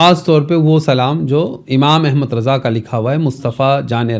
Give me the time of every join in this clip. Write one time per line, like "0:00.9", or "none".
none